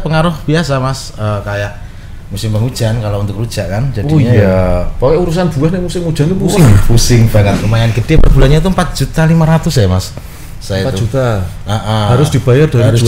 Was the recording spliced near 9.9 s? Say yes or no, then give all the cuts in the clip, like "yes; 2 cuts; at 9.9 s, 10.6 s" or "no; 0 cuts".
no; 1 cut; at 7.6 s